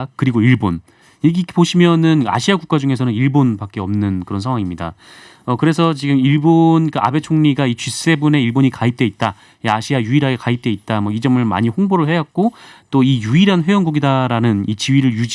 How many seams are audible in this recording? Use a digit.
0